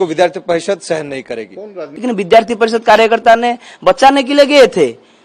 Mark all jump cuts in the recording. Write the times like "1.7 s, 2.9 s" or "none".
1.9 s